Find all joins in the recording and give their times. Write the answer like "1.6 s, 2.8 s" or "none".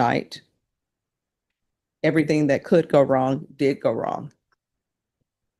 none